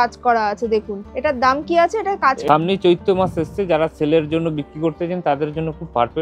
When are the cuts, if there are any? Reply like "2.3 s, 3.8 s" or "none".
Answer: 2.4 s